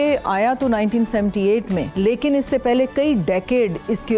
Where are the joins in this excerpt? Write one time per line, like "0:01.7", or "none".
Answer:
0:01.9